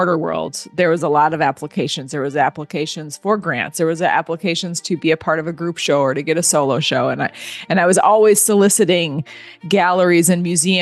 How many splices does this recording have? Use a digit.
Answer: 0